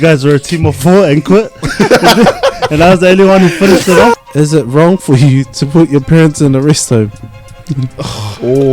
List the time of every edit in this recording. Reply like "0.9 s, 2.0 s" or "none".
4.1 s